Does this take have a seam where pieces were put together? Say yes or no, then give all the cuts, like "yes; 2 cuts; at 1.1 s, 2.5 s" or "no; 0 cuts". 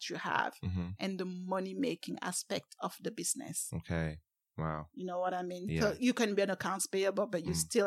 no; 0 cuts